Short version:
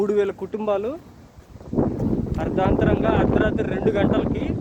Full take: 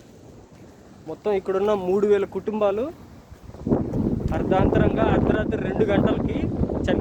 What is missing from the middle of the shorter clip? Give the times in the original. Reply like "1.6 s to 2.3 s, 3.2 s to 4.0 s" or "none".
none